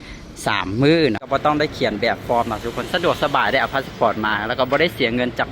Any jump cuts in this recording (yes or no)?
yes